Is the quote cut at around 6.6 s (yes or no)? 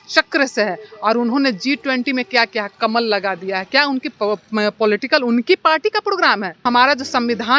yes